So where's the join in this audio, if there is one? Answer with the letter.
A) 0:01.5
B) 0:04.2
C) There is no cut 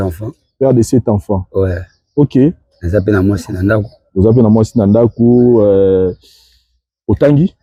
C